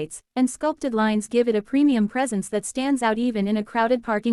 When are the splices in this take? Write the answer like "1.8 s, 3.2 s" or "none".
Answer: none